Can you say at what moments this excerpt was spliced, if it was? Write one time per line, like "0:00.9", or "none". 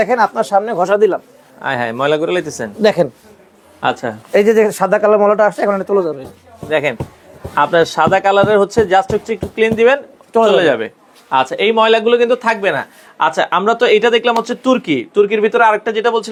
none